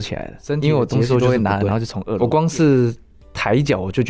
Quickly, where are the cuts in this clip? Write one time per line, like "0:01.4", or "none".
0:02.2